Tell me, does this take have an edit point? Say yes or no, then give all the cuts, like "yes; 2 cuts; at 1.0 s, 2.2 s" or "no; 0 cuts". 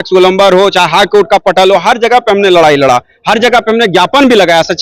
no; 0 cuts